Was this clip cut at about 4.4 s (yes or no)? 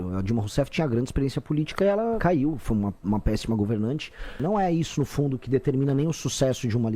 yes